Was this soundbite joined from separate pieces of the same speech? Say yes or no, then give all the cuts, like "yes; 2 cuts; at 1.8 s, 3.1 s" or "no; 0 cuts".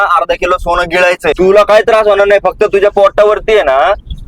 yes; 1 cut; at 1.4 s